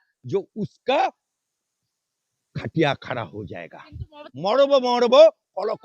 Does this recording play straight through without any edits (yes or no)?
no